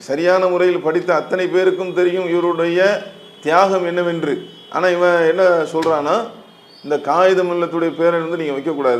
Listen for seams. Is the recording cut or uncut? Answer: uncut